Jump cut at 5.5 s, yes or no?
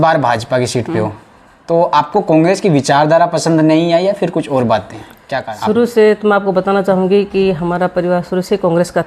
yes